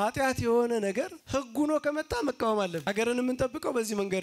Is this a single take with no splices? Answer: no; 2 cuts; at 1.2 s, 2.8 s

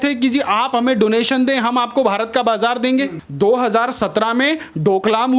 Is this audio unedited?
no; 1 cut; at 3.2 s

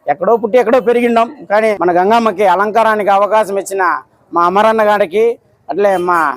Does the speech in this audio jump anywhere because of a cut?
yes; 1 cut; at 1.7 s

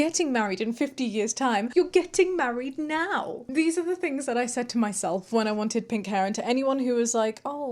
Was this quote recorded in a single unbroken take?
yes; 0 cuts

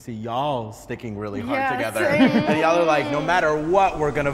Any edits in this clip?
no; 0 cuts

